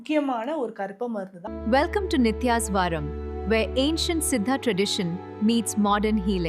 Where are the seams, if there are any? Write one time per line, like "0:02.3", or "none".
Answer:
0:01.4

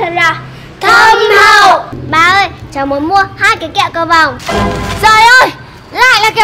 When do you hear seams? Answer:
0:01.9
0:04.4

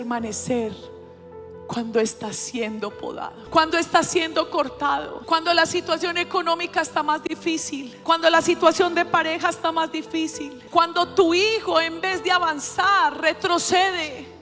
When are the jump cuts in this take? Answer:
0:03.4
0:05.1
0:07.9
0:10.6

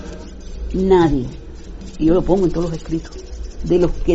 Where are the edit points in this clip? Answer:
0:02.4

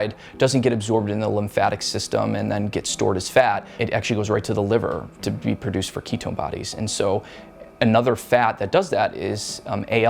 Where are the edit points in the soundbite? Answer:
0:03.7

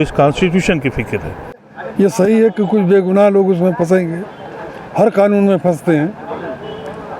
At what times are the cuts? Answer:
0:01.7

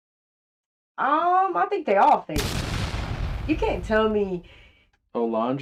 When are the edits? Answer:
none

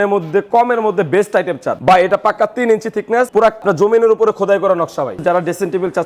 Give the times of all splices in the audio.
0:01.7
0:03.6
0:05.2

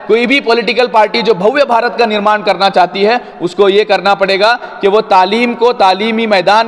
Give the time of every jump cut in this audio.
none

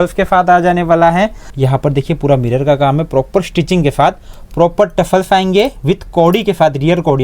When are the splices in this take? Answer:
0:01.4

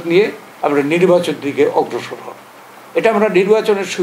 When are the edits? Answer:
none

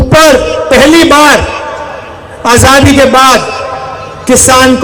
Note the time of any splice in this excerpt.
none

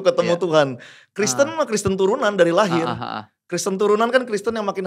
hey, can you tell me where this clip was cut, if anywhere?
none

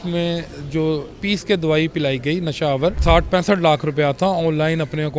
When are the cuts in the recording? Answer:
0:03.0

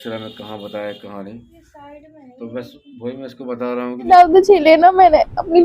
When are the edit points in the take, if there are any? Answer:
0:04.1

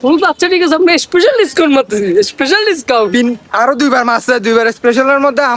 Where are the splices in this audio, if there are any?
none

